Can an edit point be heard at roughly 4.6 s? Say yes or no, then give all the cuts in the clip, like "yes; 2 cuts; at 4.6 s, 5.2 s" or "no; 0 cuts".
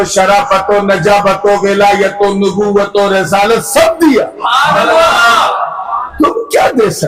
no; 0 cuts